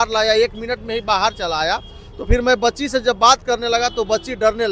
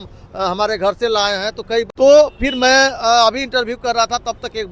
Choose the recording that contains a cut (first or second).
second